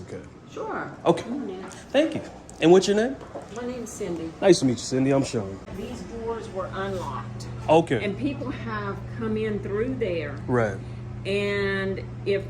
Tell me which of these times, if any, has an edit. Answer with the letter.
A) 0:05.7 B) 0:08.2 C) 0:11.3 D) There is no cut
A